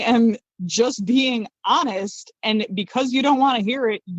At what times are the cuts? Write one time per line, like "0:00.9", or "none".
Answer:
none